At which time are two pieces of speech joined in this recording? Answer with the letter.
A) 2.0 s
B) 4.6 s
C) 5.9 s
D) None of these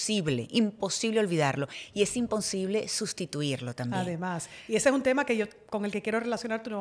D